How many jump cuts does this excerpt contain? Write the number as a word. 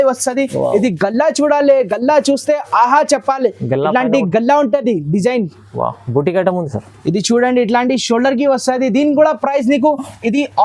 zero